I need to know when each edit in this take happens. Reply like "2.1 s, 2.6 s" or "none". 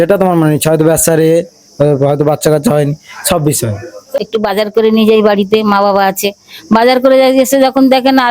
4.1 s